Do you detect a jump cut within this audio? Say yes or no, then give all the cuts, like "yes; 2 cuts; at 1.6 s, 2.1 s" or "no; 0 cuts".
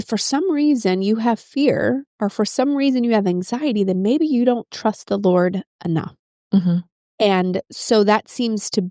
no; 0 cuts